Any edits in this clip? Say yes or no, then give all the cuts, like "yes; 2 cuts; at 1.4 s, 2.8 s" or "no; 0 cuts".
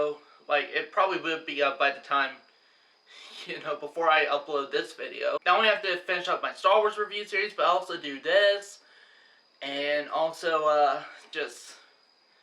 yes; 1 cut; at 5.4 s